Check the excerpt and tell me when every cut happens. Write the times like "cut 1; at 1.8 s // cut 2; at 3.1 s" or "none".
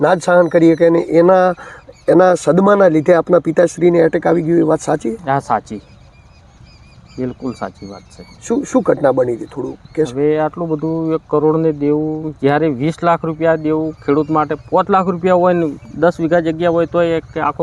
none